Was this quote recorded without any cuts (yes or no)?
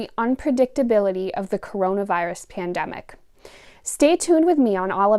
yes